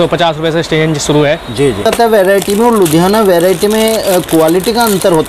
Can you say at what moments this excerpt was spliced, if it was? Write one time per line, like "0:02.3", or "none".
0:01.8